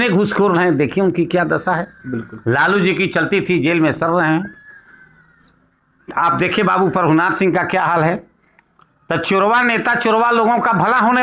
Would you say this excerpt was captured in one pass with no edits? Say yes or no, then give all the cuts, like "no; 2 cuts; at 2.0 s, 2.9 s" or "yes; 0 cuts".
yes; 0 cuts